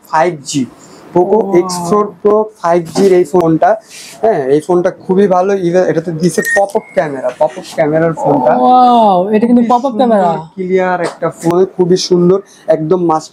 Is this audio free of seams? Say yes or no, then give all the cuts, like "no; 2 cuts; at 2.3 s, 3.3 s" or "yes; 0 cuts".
no; 2 cuts; at 3.4 s, 11.5 s